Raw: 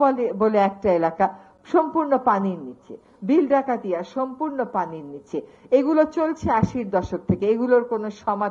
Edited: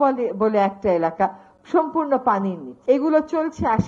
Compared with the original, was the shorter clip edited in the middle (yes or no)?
yes